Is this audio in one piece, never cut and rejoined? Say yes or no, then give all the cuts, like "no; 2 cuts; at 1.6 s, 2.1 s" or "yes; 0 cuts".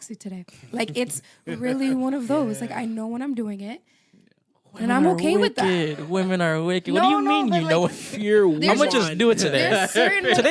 yes; 0 cuts